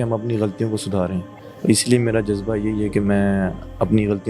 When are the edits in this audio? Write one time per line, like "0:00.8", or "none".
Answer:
none